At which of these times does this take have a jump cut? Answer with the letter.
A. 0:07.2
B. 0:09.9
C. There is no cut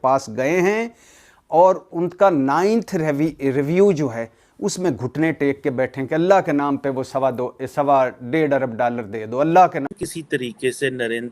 B